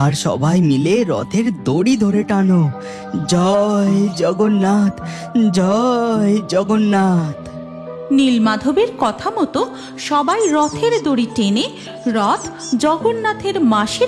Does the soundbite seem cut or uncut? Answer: uncut